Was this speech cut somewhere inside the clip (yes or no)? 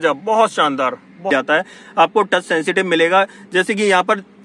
yes